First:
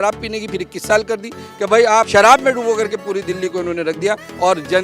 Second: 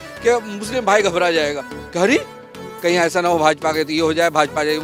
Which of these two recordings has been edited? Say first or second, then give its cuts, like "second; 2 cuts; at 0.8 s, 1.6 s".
first; 1 cut; at 2.1 s